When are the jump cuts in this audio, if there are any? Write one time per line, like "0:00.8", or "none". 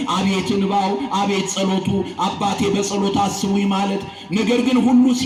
none